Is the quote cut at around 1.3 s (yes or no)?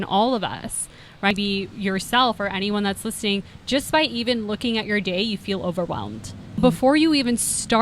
yes